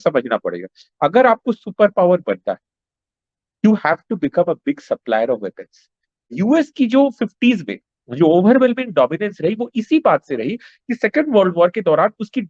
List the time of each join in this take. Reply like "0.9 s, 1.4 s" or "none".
6.3 s

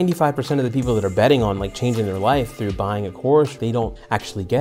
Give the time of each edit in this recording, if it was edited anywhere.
3.7 s

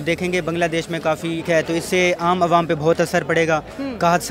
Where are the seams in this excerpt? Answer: 1.4 s

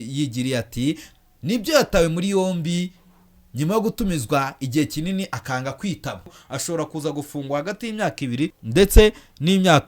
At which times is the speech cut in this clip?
6.4 s, 8.6 s

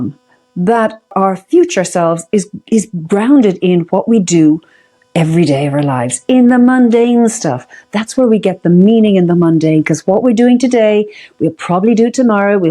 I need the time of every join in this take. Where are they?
1.1 s

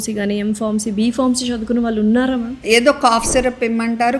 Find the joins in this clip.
2.6 s

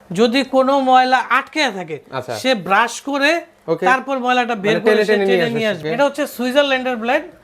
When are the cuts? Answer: 5.8 s

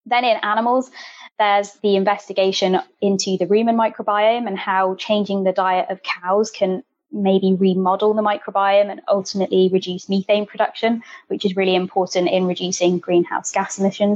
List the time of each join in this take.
none

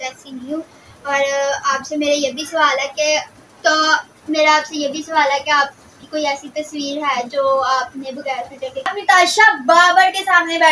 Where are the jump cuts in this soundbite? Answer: 3.4 s, 8.9 s

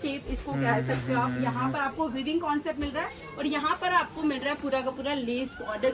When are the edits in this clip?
none

